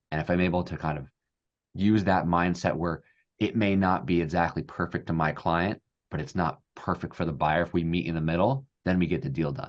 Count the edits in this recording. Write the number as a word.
zero